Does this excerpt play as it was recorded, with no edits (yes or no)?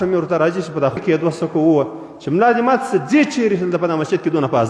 no